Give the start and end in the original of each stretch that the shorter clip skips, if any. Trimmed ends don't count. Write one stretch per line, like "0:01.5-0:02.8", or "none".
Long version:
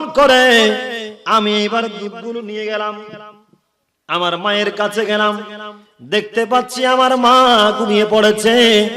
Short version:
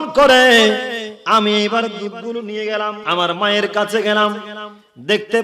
0:03.0-0:04.0